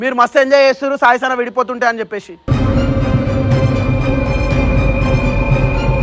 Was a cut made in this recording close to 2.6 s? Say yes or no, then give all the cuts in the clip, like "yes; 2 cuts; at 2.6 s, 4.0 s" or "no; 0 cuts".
no; 0 cuts